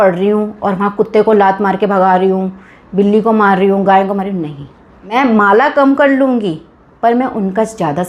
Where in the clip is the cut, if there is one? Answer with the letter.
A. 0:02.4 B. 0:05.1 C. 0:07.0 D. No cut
B